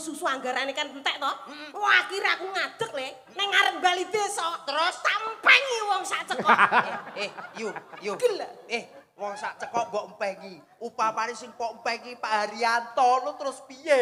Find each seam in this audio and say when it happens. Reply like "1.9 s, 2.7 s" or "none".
none